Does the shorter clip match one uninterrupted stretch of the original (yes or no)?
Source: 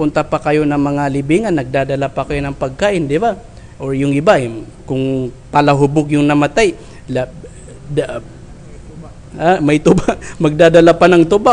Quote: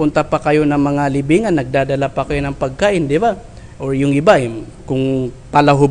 yes